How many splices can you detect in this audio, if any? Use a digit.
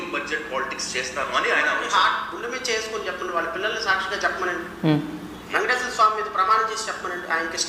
0